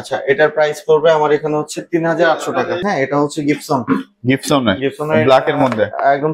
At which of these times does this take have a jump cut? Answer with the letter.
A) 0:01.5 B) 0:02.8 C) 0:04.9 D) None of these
B